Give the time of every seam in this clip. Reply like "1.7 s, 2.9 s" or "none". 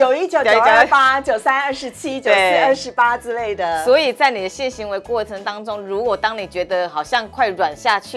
none